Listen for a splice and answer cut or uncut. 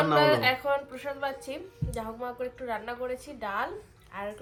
uncut